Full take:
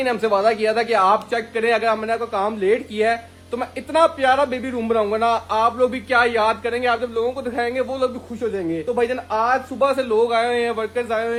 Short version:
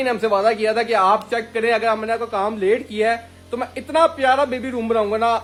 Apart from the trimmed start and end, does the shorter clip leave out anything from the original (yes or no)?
no